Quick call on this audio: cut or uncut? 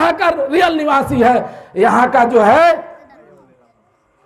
uncut